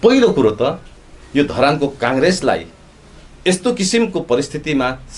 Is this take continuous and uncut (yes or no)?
yes